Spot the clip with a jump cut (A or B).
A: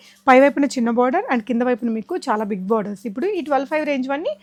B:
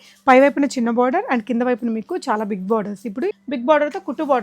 B